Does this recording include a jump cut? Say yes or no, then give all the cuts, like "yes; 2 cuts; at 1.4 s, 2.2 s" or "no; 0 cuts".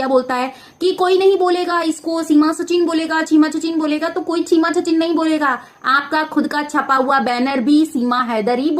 no; 0 cuts